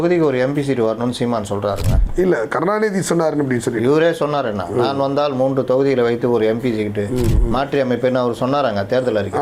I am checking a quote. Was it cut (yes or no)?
no